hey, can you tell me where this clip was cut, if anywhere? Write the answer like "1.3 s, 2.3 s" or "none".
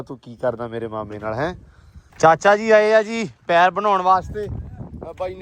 2.1 s